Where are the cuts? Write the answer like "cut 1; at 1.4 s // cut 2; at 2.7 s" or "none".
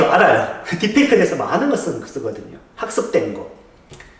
none